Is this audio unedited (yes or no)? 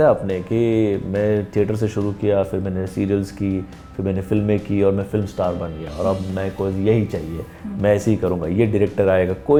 yes